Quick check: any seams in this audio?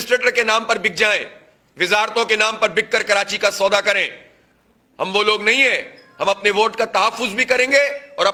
no; 0 cuts

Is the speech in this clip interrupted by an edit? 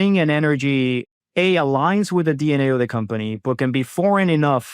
yes; 1 cut; at 1.1 s

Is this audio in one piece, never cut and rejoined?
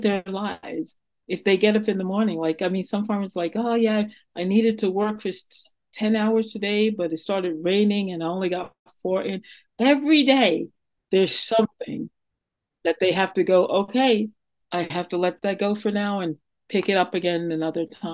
yes; 0 cuts

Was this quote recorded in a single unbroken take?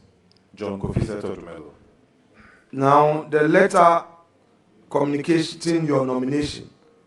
yes; 0 cuts

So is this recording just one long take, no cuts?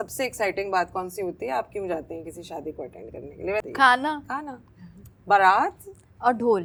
yes; 0 cuts

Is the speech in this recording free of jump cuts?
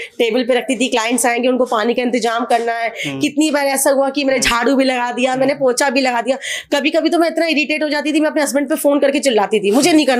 yes; 0 cuts

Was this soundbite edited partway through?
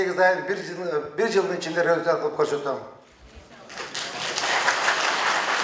no; 0 cuts

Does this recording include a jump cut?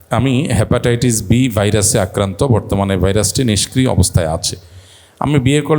no; 0 cuts

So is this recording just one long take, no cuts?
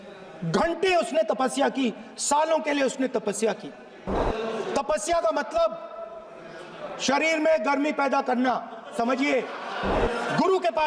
no; 2 cuts; at 4.1 s, 10.0 s

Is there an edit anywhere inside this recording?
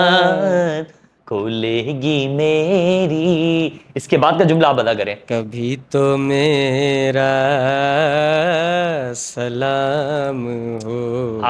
no; 0 cuts

